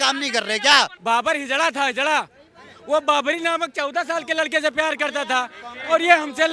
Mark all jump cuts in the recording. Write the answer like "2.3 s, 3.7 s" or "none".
1.0 s